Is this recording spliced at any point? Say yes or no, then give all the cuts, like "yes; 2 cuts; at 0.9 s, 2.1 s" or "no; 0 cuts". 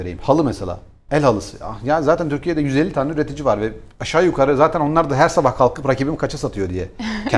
no; 0 cuts